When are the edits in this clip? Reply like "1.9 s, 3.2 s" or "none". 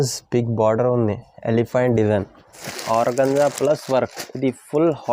2.7 s